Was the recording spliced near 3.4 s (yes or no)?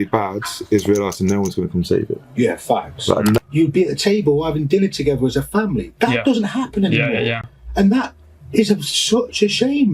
yes